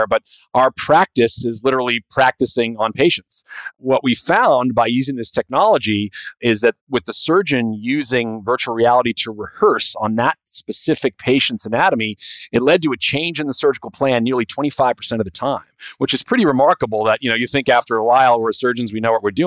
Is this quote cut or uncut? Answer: cut